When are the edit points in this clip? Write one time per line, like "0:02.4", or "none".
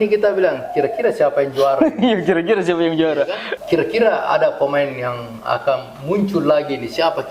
0:03.5